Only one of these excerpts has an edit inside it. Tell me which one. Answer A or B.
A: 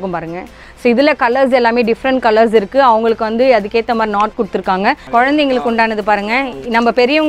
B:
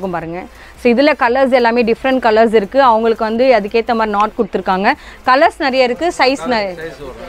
A